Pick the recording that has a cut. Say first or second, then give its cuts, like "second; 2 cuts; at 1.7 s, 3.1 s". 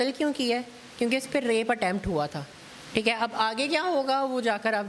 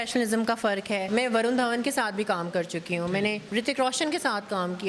second; 2 cuts; at 1.1 s, 3.4 s